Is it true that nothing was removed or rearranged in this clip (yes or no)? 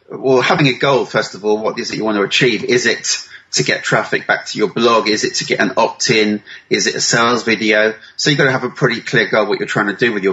yes